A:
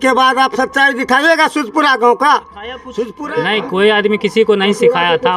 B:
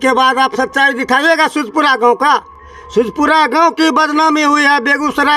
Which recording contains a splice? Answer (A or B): A